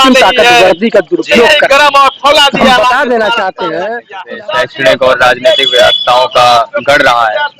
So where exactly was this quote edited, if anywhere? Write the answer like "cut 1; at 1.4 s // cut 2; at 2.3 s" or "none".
cut 1; at 4.1 s